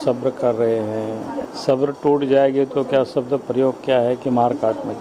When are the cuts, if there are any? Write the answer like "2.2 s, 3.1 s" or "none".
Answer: 1.5 s